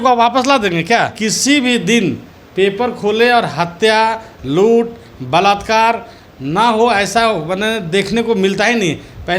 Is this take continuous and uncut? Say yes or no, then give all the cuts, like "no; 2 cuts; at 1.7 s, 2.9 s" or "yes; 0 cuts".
no; 1 cut; at 1.2 s